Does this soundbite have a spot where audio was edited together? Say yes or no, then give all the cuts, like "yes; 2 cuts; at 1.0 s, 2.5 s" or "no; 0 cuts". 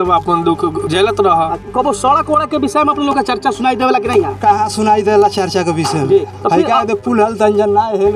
yes; 2 cuts; at 0.9 s, 1.6 s